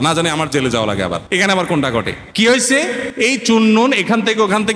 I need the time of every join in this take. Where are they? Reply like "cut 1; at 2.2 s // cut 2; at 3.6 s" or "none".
cut 1; at 1.2 s // cut 2; at 2.2 s // cut 3; at 3.1 s